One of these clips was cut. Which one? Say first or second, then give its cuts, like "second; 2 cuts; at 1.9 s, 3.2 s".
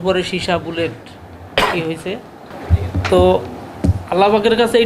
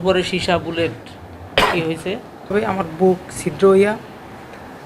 second; 1 cut; at 2.5 s